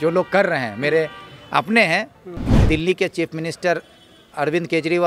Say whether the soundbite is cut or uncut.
cut